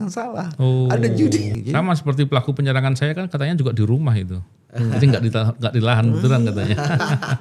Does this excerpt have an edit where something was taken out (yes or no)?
yes